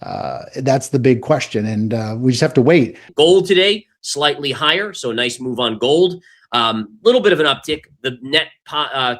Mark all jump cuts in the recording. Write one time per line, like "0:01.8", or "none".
0:03.0